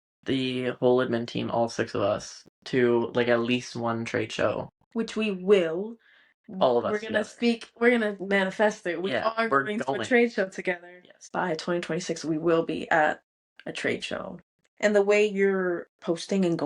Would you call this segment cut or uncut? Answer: cut